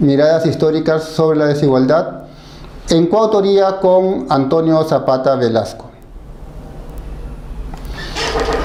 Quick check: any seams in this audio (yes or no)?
no